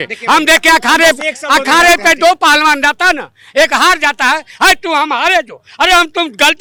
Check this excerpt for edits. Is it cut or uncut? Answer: uncut